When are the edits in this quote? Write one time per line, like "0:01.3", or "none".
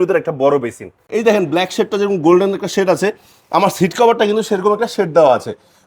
0:01.0